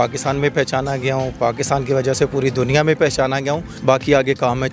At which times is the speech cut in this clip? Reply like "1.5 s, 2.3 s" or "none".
3.7 s